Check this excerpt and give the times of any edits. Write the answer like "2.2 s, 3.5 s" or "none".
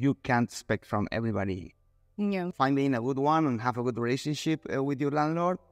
none